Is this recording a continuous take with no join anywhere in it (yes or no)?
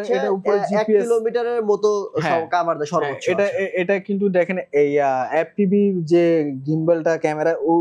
yes